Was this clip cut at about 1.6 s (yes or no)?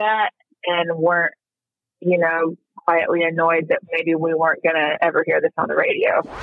no